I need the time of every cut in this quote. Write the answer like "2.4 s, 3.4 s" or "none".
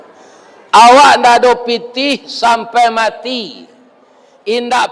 none